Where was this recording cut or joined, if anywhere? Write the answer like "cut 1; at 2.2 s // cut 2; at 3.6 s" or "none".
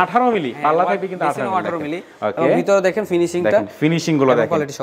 none